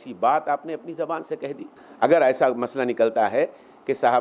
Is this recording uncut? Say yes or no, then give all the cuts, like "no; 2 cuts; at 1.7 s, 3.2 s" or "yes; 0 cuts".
no; 1 cut; at 1.9 s